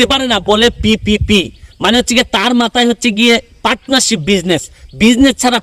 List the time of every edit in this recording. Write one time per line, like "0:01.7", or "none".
none